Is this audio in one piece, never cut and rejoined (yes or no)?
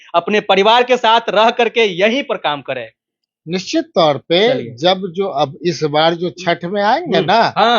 yes